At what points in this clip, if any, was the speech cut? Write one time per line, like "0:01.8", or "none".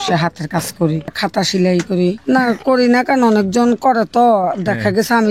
0:01.2
0:02.2